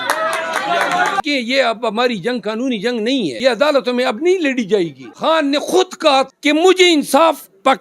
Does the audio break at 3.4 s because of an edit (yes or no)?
yes